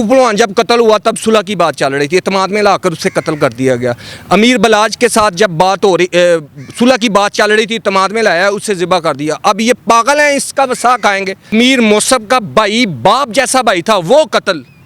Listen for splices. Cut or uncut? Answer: cut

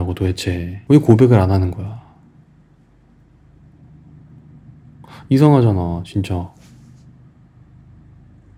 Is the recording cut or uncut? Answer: uncut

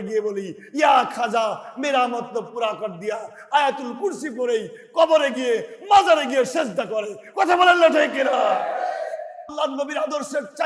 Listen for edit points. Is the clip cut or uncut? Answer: cut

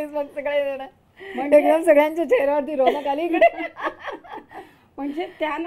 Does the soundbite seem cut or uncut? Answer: uncut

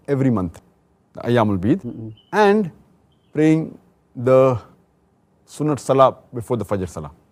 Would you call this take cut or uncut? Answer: uncut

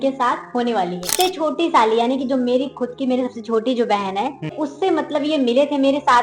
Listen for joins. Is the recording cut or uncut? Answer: cut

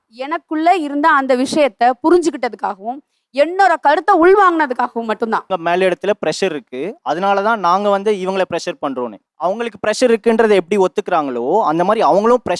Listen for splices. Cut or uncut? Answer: cut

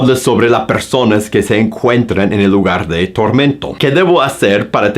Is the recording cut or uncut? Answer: cut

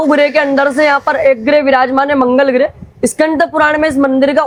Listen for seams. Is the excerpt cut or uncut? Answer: uncut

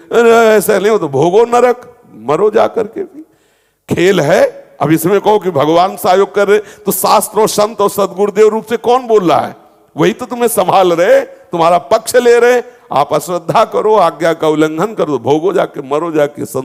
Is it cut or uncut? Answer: uncut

